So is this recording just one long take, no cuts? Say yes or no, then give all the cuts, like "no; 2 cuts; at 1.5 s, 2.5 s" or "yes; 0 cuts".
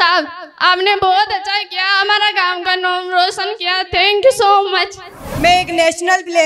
no; 1 cut; at 5.2 s